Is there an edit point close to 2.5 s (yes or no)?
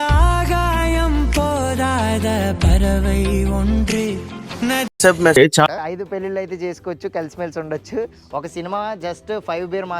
no